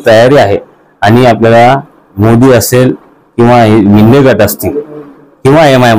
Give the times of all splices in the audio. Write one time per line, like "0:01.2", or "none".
none